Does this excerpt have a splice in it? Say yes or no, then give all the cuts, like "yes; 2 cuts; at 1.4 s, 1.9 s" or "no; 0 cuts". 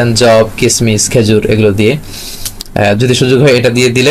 no; 0 cuts